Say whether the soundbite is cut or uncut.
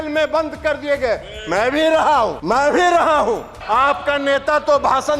cut